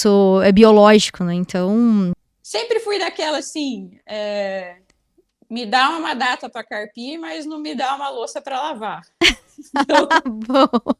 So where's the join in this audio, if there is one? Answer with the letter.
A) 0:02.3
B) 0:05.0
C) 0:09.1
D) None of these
A